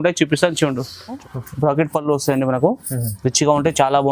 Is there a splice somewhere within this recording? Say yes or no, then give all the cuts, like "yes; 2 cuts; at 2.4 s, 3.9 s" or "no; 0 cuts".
yes; 1 cut; at 1.2 s